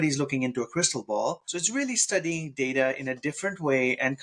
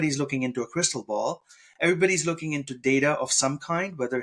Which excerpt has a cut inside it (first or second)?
first